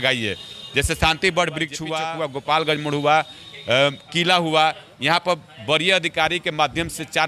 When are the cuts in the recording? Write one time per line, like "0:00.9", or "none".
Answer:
0:01.8

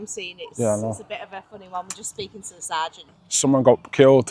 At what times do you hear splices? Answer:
0:03.1

